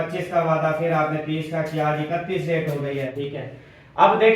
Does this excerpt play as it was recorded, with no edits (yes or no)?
no